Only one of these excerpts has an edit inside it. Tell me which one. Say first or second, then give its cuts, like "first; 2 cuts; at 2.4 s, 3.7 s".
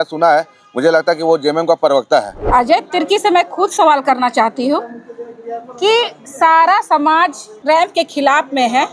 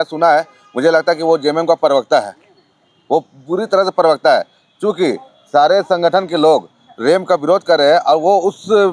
first; 2 cuts; at 2.4 s, 7.6 s